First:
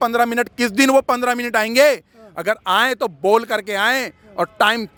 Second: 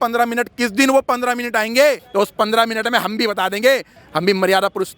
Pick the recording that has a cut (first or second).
second